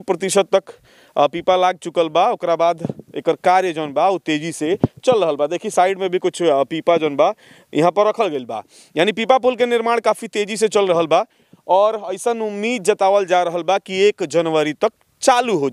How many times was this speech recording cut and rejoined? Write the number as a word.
zero